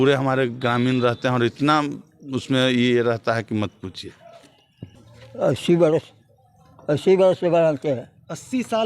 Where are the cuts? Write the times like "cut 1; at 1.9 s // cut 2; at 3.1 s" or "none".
cut 1; at 5.0 s